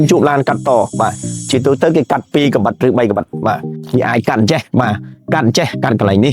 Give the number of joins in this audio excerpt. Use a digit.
1